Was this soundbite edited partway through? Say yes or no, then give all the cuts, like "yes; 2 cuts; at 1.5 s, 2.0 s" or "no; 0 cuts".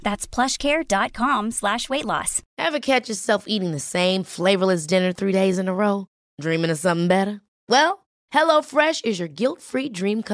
yes; 1 cut; at 2.4 s